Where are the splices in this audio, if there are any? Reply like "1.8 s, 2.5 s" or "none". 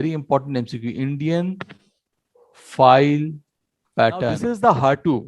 4.4 s

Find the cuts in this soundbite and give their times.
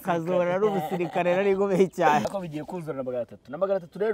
2.3 s

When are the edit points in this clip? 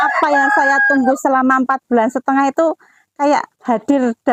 none

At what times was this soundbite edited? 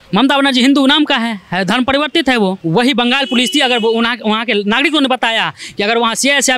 2.6 s

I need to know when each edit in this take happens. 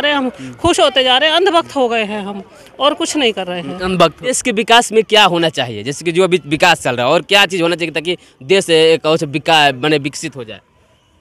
4.4 s

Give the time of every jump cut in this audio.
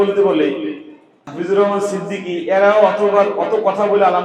1.2 s

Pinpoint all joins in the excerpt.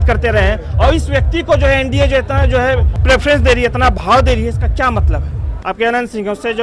2.9 s, 5.5 s

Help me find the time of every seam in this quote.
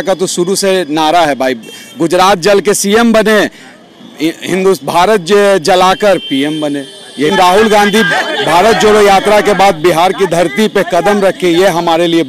7.3 s

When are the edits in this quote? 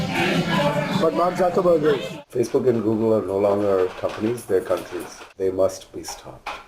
2.2 s, 5.2 s

